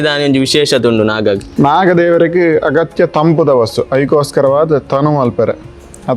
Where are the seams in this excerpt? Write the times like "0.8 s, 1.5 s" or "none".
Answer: 1.5 s